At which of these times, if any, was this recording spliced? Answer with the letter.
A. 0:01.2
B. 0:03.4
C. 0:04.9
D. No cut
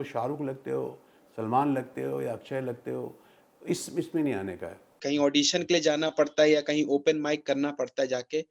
C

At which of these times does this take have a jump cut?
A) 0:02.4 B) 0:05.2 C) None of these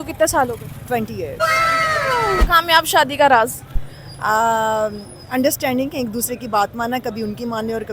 A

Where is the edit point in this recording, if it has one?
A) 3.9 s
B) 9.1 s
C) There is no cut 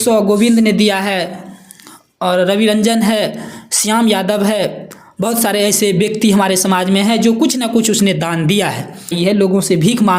B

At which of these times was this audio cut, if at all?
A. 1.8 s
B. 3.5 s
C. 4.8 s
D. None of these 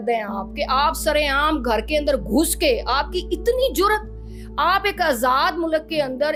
D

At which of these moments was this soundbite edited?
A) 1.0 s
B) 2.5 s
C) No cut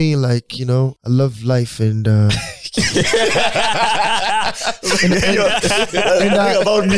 A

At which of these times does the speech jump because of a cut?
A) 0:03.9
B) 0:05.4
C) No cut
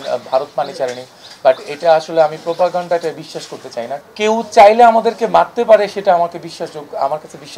A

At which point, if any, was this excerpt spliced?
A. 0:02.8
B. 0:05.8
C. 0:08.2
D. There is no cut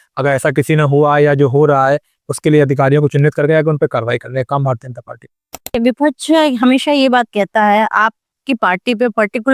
B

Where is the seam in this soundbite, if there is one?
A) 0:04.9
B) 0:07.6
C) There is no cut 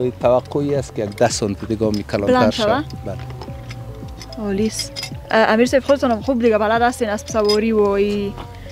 C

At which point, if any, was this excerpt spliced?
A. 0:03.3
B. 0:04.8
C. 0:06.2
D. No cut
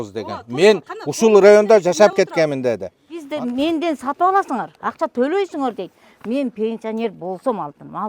A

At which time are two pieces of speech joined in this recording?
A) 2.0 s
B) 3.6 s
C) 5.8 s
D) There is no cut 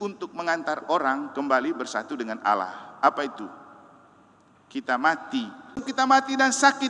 C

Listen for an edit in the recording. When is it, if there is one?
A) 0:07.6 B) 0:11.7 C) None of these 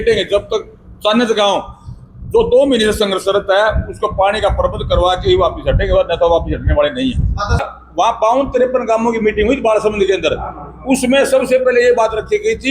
A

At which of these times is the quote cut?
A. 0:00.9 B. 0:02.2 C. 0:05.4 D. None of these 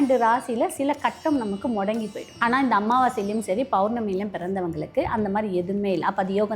B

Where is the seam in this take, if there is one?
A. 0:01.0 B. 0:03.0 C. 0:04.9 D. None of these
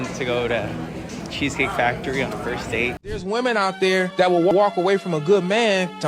B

